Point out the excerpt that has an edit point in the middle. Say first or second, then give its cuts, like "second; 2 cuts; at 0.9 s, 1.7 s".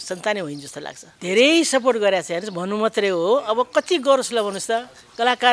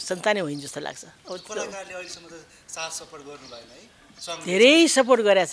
first; 1 cut; at 1.1 s